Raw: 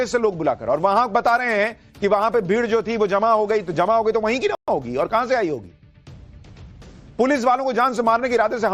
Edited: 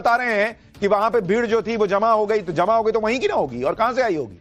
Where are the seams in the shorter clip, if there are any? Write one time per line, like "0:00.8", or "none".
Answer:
0:03.3